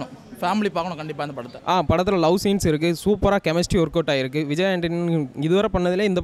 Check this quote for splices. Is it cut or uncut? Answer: cut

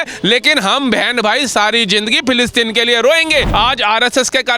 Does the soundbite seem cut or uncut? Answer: cut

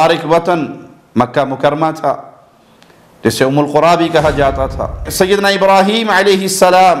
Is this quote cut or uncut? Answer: cut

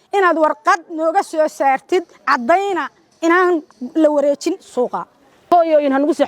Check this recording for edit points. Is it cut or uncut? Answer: cut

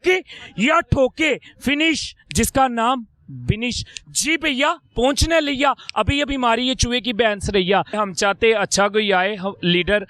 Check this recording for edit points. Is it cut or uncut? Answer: cut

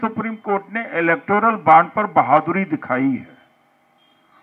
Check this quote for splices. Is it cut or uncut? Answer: uncut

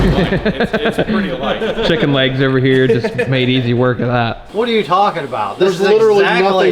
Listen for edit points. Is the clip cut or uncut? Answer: cut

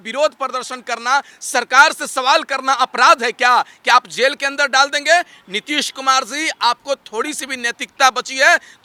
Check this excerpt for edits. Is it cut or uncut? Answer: uncut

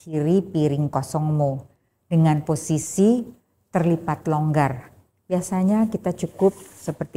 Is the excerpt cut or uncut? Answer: uncut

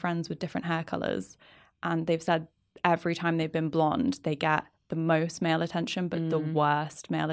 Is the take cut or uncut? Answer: uncut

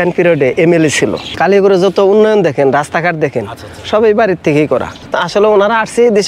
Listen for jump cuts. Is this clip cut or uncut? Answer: cut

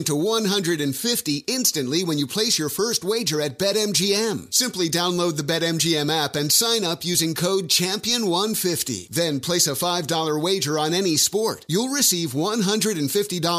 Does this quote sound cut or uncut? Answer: uncut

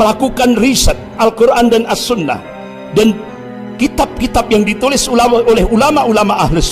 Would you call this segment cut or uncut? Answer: cut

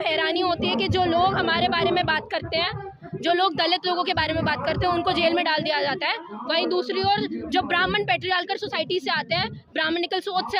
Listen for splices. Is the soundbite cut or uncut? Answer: uncut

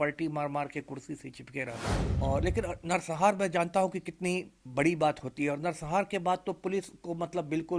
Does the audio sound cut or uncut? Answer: cut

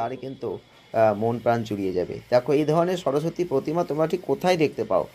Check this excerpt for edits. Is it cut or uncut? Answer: uncut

